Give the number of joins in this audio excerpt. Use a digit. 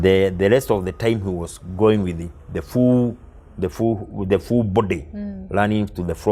0